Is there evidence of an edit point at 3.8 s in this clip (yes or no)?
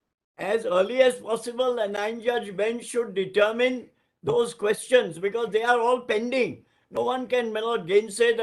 no